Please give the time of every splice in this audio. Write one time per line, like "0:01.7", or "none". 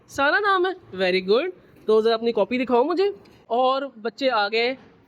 0:03.3